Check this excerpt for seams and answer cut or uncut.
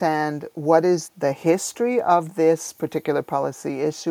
cut